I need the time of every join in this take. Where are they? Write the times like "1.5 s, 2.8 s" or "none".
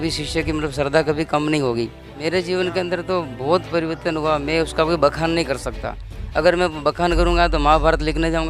2.2 s